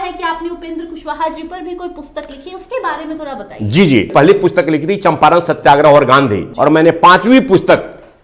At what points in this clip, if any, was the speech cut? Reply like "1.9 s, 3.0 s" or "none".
4.1 s, 6.5 s